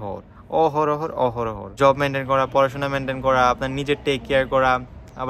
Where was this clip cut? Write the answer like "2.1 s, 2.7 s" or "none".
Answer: 1.7 s